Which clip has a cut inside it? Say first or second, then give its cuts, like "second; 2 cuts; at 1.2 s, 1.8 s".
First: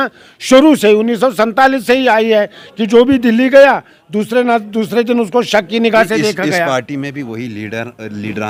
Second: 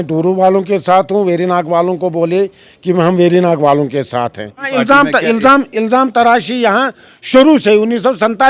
second; 1 cut; at 4.7 s